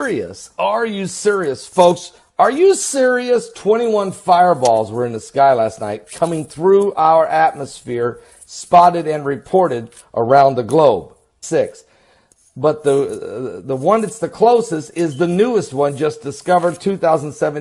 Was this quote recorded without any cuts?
yes; 0 cuts

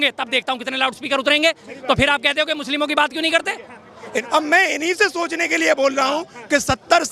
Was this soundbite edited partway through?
yes; 1 cut; at 4.1 s

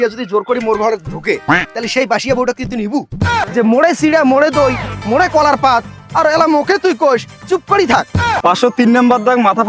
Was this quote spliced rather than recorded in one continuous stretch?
yes; 2 cuts; at 3.5 s, 8.4 s

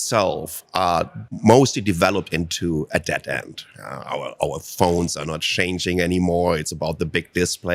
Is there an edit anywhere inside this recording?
yes; 1 cut; at 1.2 s

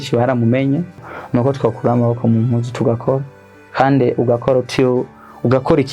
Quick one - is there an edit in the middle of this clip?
yes; 1 cut; at 1.0 s

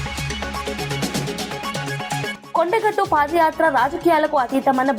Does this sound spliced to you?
yes; 1 cut; at 2.3 s

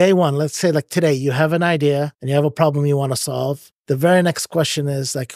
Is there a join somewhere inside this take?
yes; 2 cuts; at 2.2 s, 3.7 s

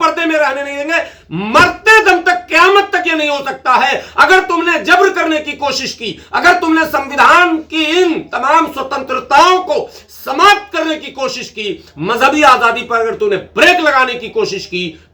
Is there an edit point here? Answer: no; 0 cuts

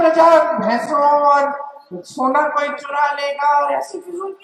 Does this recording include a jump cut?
no; 0 cuts

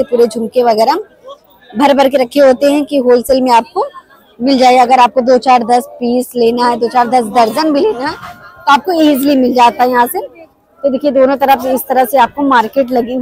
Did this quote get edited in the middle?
no; 0 cuts

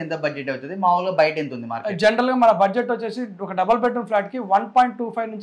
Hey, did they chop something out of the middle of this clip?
no; 0 cuts

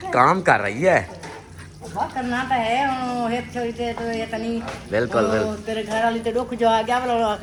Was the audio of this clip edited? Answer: no; 0 cuts

